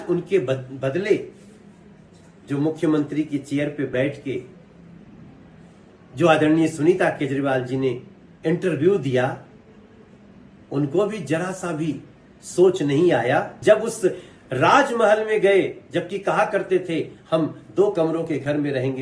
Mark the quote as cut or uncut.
cut